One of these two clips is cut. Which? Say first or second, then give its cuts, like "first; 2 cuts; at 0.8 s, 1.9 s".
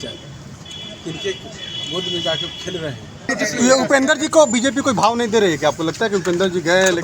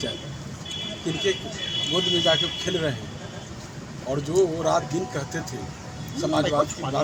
first; 1 cut; at 3.3 s